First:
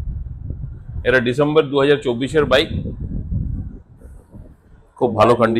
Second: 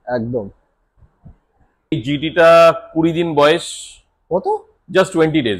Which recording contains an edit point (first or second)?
second